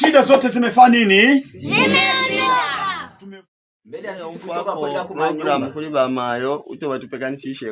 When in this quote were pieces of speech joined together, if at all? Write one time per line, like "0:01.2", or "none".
0:03.1